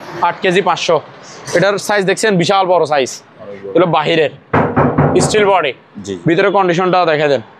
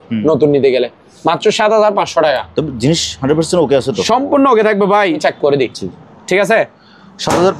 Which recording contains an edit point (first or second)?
second